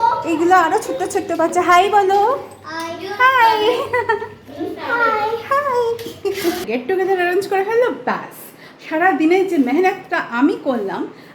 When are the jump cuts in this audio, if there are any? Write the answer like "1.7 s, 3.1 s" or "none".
6.6 s